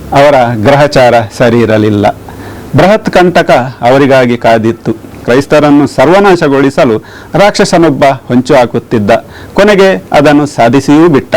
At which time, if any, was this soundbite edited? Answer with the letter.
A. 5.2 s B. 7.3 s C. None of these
A